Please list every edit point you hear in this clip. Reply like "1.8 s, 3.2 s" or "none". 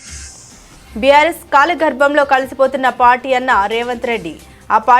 0.9 s